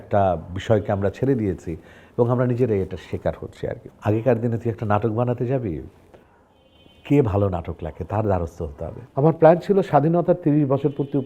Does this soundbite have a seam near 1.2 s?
no; 2 cuts; at 3.8 s, 9.0 s

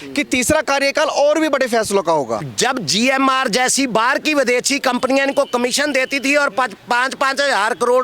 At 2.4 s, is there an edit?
yes; 1 cut; at 2.4 s

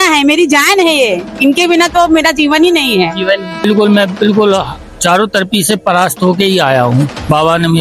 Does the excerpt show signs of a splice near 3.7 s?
yes; 1 cut; at 3.7 s

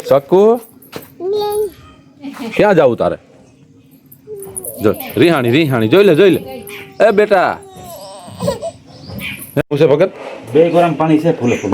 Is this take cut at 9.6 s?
yes; 1 cut; at 9.6 s

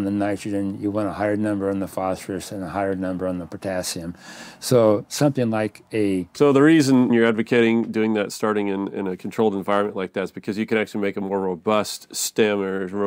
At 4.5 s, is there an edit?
no; 2 cuts; at 6.3 s, 7.1 s

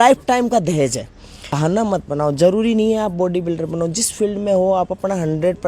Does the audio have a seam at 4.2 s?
no; 1 cut; at 1.6 s

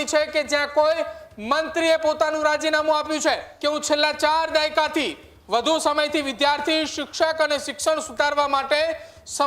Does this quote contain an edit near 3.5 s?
yes; 1 cut; at 3.5 s

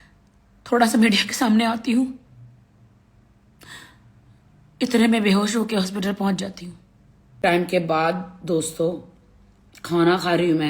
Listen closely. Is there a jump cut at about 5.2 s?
no; 1 cut; at 7.5 s

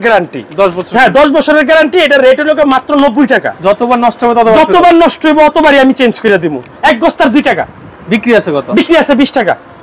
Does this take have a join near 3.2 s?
no; 1 cut; at 6.8 s

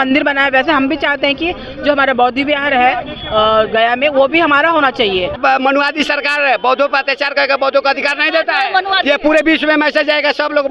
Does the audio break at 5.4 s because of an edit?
yes; 1 cut; at 5.4 s

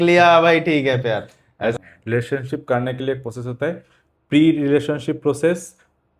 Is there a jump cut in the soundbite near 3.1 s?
no; 1 cut; at 1.8 s

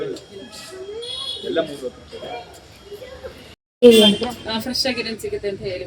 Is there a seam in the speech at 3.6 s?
yes; 1 cut; at 3.6 s

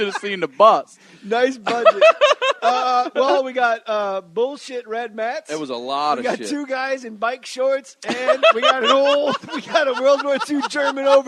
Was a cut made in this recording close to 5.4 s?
yes; 1 cut; at 5.4 s

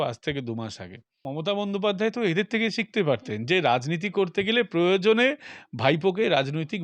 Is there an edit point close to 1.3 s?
yes; 1 cut; at 1.3 s

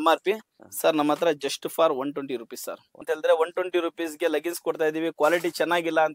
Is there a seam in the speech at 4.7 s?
no; 1 cut; at 3.0 s

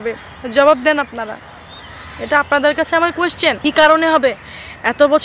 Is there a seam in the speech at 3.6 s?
yes; 1 cut; at 3.6 s

